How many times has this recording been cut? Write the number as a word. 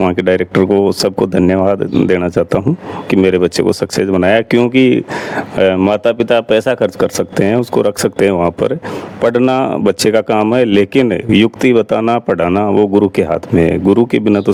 zero